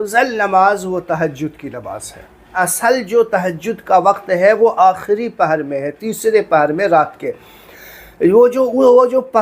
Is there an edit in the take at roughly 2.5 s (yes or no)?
yes